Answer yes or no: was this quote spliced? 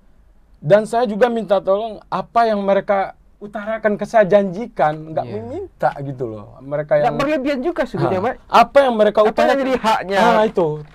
no